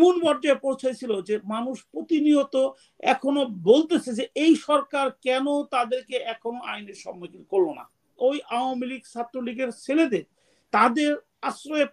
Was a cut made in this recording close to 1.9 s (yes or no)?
no